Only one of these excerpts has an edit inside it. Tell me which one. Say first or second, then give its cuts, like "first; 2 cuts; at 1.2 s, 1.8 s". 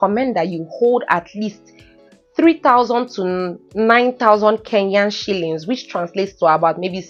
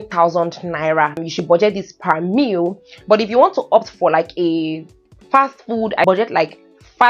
second; 2 cuts; at 1.2 s, 6.1 s